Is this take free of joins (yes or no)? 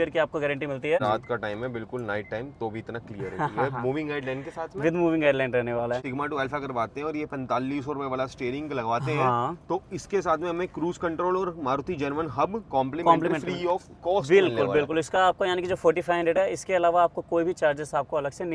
no